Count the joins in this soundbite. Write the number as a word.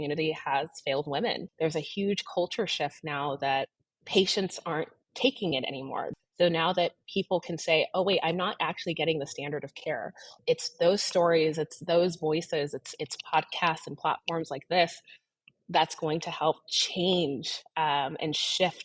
three